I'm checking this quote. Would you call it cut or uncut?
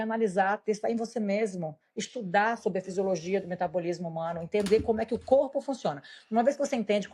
uncut